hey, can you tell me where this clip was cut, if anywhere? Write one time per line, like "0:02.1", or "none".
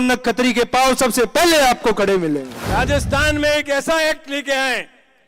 0:02.6